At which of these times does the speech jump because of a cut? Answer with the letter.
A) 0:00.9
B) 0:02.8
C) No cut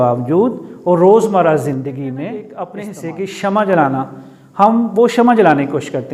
B